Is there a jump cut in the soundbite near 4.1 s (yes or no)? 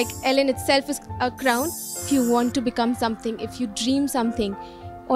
no